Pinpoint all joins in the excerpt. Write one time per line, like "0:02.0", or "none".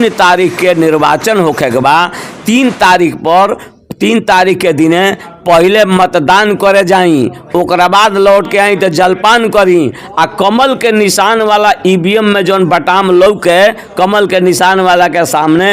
none